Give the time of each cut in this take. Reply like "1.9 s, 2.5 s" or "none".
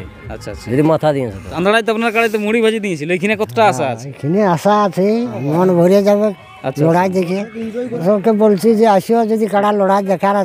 1.6 s, 5.4 s, 8.0 s